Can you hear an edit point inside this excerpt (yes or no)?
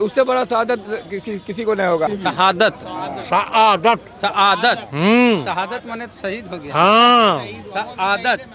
yes